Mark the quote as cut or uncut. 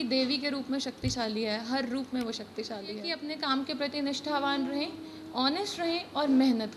cut